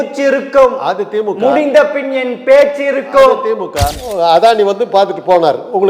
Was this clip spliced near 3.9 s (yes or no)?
yes